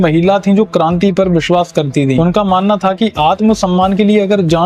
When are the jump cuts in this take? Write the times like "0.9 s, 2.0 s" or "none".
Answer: 2.2 s